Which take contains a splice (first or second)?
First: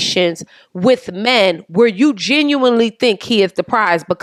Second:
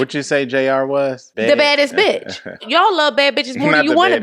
second